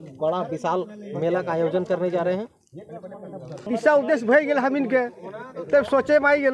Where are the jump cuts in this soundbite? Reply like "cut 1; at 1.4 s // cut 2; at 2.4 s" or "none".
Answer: cut 1; at 3.7 s